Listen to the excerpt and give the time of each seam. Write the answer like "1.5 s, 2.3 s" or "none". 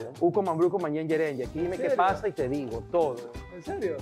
none